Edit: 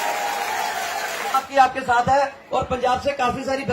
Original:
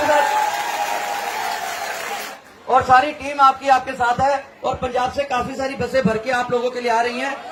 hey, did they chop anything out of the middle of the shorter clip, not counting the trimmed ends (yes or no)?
yes